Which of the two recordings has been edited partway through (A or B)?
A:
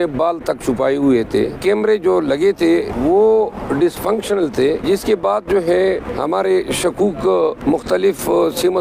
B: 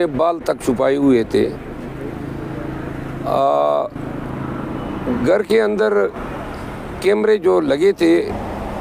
A